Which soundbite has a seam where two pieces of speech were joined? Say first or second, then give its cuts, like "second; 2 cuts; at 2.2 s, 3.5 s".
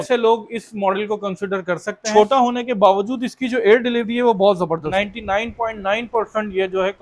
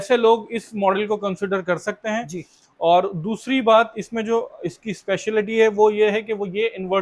first; 2 cuts; at 2.1 s, 4.9 s